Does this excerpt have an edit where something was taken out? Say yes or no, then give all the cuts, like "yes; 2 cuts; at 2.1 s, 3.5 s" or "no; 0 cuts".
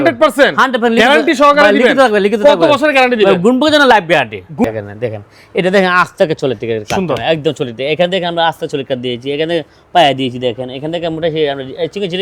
yes; 1 cut; at 4.6 s